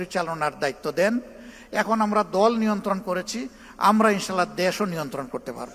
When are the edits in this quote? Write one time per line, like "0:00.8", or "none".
none